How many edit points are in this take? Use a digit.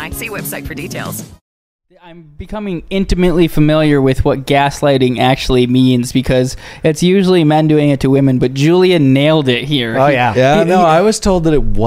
1